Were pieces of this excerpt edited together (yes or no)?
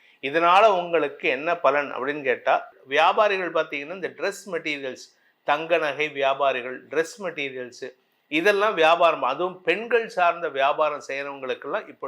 yes